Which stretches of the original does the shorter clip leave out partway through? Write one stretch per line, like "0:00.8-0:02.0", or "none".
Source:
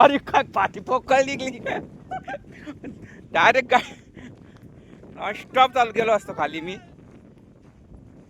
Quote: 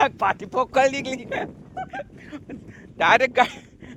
none